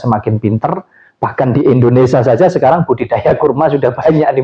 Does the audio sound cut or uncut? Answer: uncut